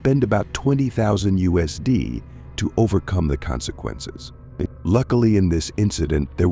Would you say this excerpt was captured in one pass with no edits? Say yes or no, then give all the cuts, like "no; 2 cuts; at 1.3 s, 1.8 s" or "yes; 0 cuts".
yes; 0 cuts